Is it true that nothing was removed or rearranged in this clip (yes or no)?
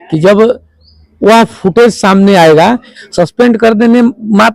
no